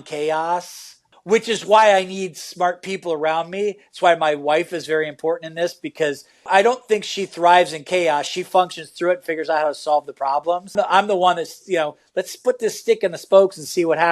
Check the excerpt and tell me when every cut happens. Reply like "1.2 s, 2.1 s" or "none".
1.0 s, 6.4 s, 10.7 s